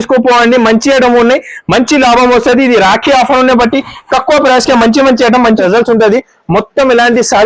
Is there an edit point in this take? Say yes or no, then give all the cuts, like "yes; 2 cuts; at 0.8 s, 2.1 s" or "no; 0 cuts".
yes; 1 cut; at 5.6 s